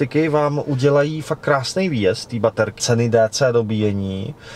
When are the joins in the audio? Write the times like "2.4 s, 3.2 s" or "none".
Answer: 2.8 s

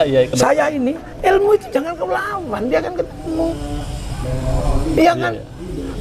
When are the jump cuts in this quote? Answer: 1.1 s

